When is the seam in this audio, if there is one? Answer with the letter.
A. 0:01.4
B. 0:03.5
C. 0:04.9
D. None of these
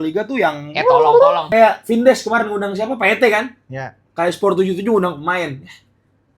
A